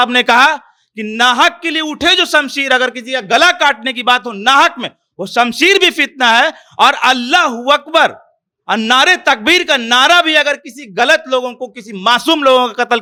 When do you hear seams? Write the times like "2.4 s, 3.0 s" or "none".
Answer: none